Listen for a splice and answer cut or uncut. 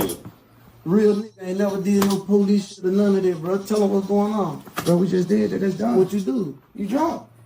cut